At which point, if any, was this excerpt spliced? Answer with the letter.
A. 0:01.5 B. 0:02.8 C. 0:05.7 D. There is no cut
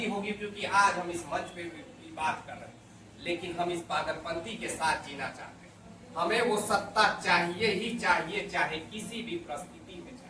D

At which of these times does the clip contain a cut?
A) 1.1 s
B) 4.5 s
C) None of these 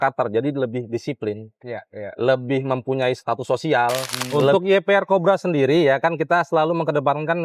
B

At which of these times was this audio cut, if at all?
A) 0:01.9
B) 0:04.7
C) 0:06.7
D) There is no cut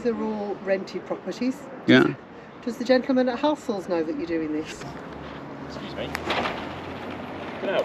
B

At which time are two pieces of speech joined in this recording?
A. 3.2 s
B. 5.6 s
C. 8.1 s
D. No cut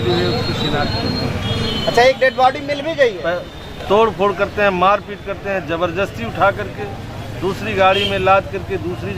A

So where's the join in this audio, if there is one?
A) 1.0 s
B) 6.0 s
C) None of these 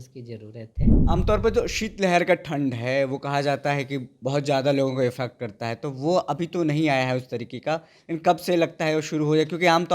A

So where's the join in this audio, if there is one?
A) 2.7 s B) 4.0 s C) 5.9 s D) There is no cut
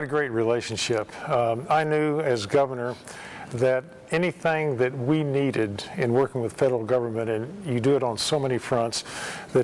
B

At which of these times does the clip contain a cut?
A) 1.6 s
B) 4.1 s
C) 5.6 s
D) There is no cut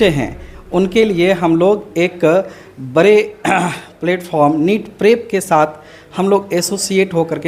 D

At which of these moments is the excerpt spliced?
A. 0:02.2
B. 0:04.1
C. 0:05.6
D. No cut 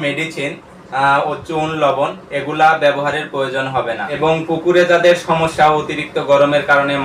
B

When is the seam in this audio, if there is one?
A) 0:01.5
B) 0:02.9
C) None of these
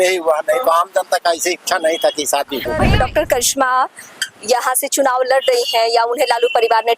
B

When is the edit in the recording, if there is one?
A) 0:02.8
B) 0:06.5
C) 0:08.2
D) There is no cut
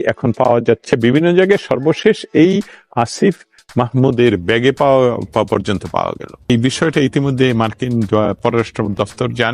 B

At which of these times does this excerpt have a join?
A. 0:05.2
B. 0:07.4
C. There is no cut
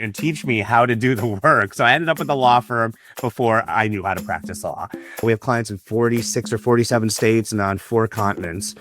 A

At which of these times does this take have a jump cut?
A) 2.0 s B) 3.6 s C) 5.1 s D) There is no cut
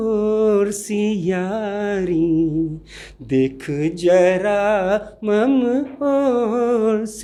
D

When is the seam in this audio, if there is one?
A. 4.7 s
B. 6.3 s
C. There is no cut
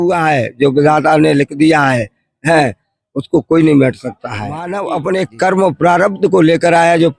A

